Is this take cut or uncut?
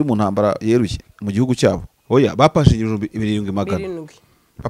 cut